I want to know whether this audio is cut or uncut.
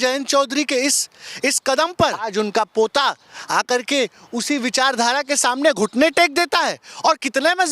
cut